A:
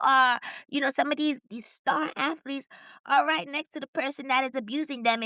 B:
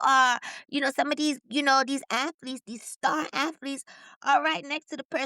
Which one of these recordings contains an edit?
A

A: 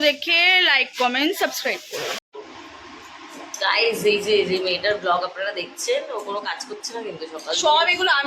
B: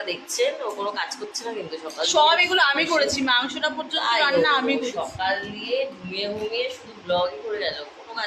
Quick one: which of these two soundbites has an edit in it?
A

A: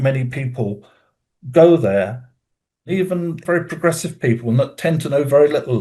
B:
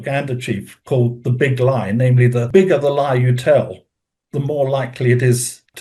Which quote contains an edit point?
A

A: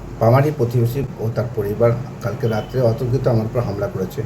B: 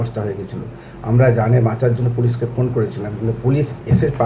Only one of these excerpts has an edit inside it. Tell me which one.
A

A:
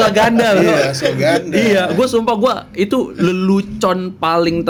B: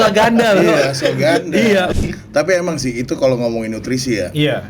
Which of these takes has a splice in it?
B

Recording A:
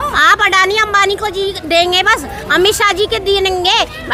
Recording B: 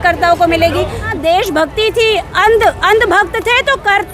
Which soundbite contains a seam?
B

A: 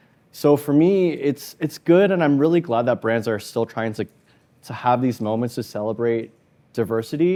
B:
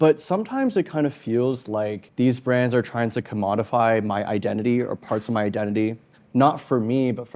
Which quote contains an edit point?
B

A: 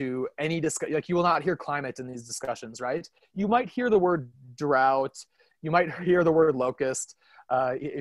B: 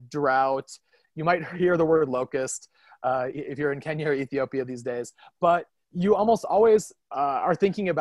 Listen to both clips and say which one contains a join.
B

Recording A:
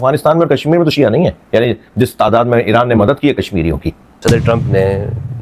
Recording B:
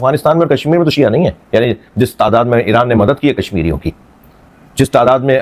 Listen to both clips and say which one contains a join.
A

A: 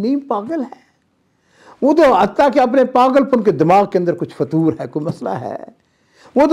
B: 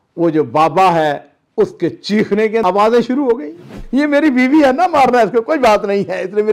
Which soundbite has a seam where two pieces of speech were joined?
B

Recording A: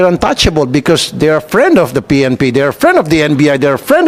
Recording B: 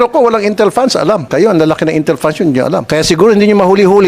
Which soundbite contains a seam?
B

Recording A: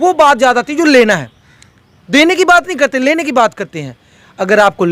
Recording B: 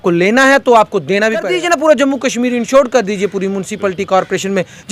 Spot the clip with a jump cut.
B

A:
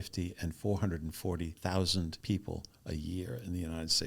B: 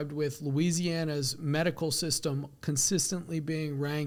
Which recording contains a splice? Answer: A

